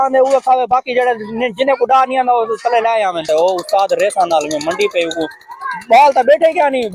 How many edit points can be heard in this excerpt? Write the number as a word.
one